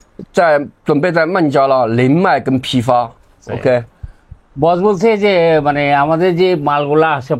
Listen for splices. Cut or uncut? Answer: uncut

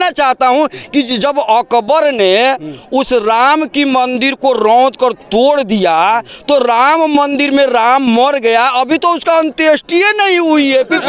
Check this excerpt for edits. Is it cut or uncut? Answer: uncut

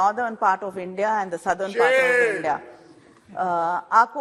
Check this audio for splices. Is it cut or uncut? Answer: uncut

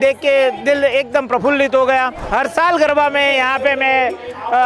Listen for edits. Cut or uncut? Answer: cut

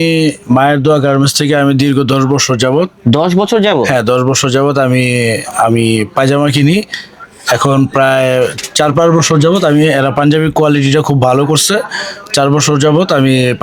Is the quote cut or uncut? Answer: uncut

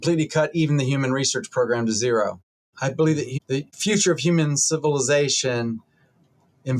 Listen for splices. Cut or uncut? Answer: cut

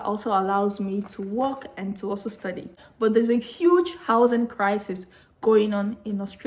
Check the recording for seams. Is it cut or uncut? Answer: cut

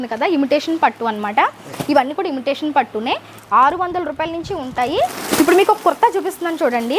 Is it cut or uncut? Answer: cut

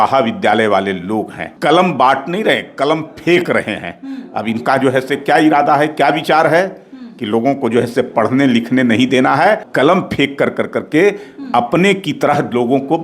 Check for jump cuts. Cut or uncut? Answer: cut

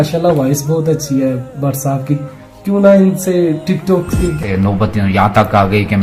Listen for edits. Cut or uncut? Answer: cut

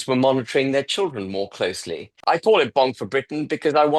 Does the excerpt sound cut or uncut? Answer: cut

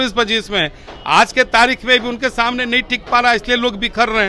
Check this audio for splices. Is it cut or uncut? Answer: uncut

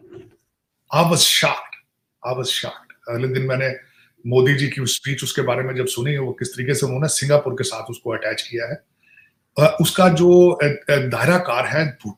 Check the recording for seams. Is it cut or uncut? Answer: uncut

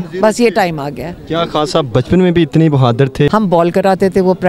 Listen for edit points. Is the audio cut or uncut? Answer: cut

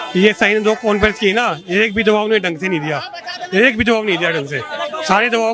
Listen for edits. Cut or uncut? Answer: uncut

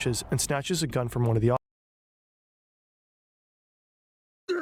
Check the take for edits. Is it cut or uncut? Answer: uncut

